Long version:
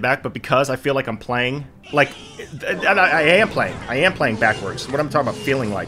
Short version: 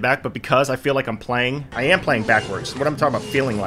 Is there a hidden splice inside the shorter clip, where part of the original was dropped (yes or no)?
yes